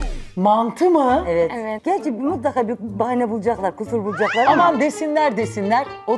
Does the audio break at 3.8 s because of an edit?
no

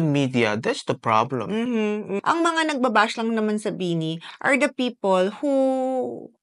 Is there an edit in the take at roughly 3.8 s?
no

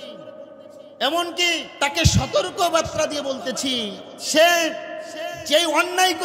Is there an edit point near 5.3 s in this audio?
no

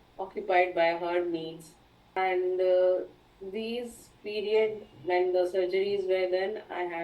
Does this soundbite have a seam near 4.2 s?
no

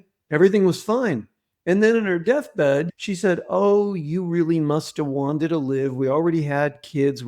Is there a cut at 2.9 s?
yes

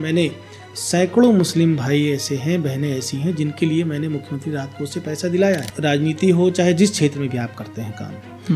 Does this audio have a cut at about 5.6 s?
yes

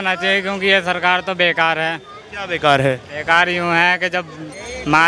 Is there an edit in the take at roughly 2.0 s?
no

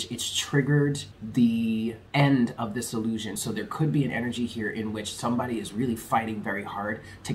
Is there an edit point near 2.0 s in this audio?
yes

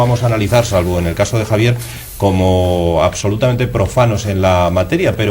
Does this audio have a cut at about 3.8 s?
no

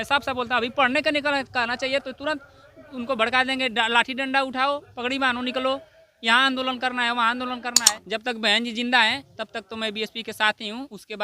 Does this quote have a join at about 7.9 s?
yes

